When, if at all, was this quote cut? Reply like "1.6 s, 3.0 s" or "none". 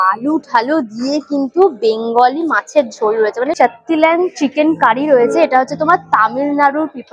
3.5 s